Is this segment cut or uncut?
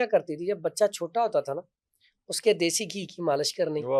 uncut